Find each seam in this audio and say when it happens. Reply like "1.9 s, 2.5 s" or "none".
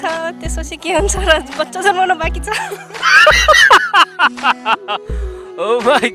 none